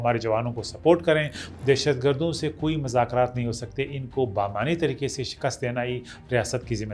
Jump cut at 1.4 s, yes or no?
yes